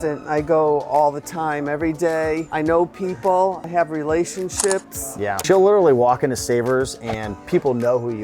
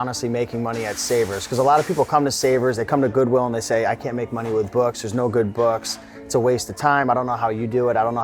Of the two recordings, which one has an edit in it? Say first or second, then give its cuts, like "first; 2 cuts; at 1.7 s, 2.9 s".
first; 3 cuts; at 2.5 s, 3.6 s, 5.4 s